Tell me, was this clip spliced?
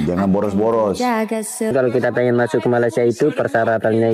yes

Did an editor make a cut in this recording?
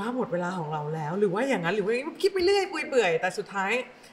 no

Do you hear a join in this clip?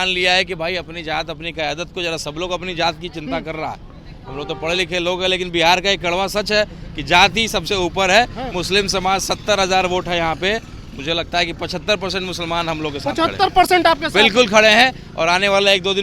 no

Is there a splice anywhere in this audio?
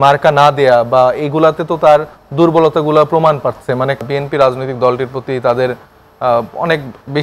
yes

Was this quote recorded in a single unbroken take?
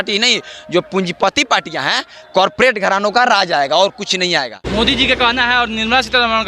no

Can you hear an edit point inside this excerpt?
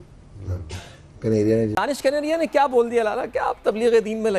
yes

